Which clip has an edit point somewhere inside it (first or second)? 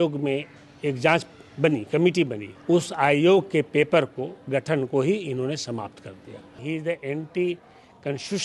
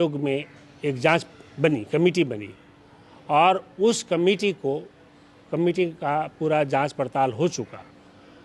first